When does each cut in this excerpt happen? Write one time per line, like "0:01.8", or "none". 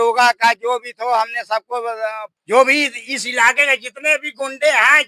0:02.2